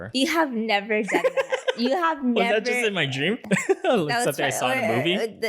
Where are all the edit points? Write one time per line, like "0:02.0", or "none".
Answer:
0:03.4